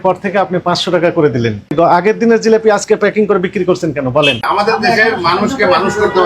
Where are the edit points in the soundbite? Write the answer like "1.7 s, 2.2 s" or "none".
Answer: 1.7 s, 4.5 s